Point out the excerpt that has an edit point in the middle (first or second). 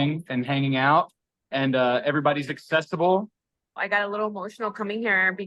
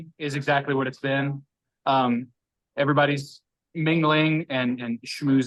first